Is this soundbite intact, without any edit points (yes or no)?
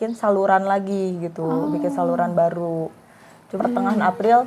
no